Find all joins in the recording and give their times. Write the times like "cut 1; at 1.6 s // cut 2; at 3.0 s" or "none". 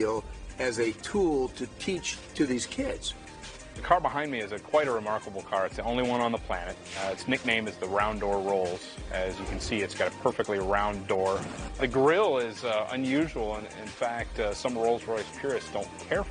cut 1; at 2.2 s // cut 2; at 3.1 s // cut 3; at 11.6 s